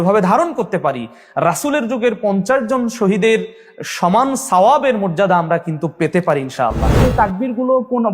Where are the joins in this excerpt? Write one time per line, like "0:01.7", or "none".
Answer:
0:07.0